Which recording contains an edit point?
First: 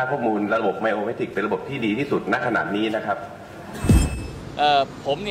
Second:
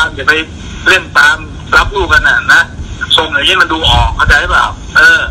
first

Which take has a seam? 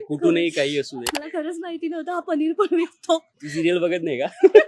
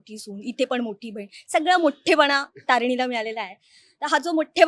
first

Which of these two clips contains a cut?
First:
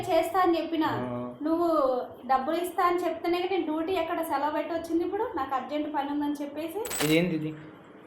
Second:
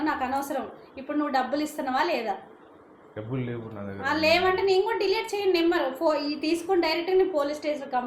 first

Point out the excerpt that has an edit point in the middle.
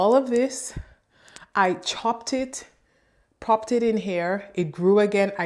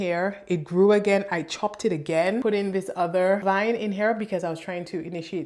second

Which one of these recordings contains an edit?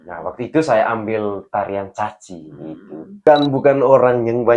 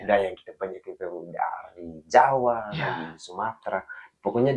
first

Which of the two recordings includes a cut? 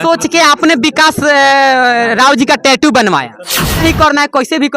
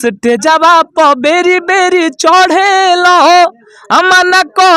first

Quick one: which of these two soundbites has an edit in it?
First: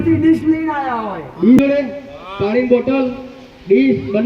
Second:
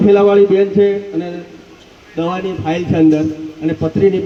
first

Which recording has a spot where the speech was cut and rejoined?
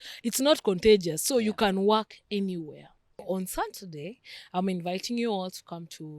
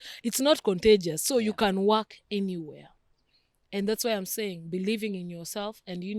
first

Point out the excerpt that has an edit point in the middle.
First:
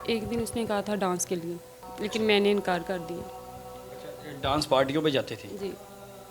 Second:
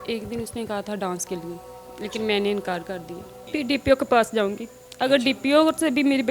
second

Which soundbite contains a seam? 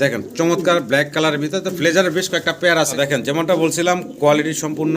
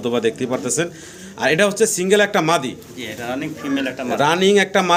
first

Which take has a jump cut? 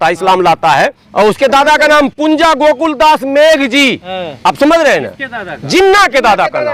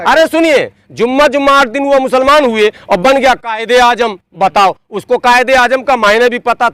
first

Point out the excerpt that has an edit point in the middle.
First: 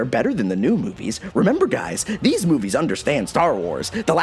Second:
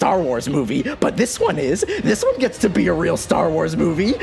second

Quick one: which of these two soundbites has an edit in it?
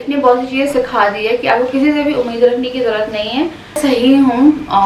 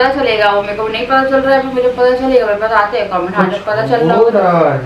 first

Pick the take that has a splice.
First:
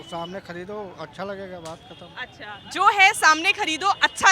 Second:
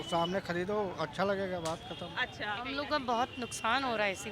second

